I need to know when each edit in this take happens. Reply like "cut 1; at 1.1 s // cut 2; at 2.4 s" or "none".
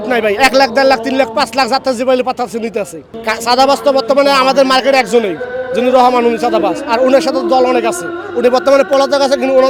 none